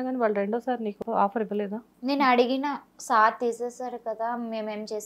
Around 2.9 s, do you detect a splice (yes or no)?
no